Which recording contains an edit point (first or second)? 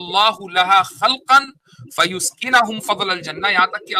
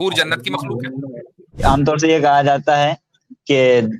second